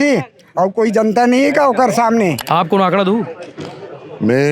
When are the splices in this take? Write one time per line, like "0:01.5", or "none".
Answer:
0:02.4